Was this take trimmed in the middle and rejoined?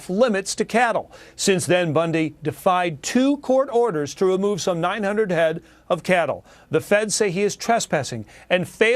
yes; 1 cut; at 3.5 s

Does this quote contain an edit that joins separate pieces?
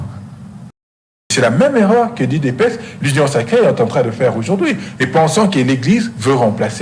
yes; 1 cut; at 1.3 s

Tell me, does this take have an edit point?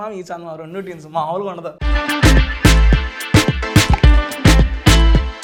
no; 0 cuts

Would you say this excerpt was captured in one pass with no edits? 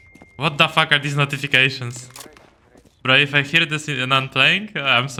yes; 0 cuts

